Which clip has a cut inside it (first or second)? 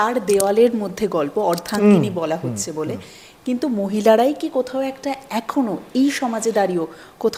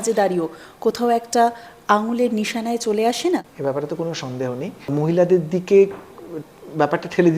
second